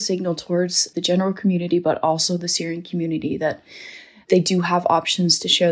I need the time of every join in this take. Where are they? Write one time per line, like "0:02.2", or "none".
0:00.9